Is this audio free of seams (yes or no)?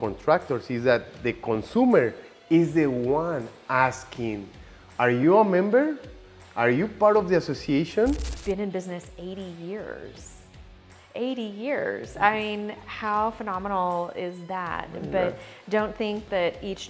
no